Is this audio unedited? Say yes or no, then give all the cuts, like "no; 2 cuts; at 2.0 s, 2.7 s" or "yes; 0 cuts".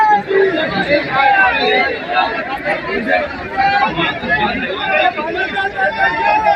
yes; 0 cuts